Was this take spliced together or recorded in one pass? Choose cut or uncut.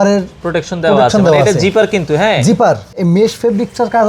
cut